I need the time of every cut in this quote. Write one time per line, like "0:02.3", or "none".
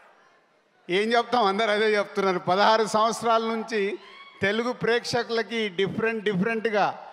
none